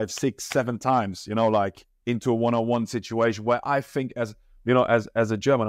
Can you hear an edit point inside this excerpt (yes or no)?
no